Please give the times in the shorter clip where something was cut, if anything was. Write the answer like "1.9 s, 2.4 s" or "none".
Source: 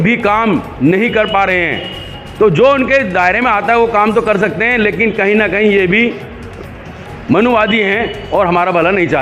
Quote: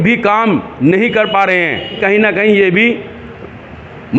2.0 s